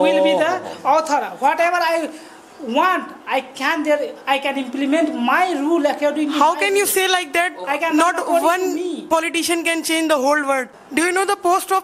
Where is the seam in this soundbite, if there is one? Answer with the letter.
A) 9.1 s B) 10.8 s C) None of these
B